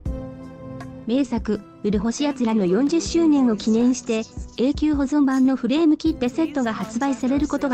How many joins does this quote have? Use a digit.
1